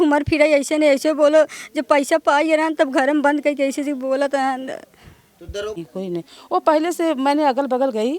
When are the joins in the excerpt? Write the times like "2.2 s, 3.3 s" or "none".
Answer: 5.8 s